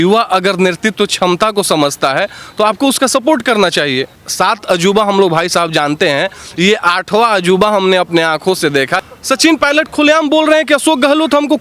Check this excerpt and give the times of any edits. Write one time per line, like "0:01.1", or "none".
0:04.2
0:09.1